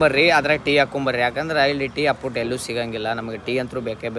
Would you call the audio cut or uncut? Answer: uncut